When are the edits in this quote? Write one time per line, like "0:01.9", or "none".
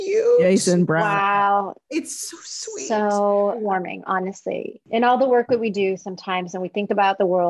0:03.6
0:04.8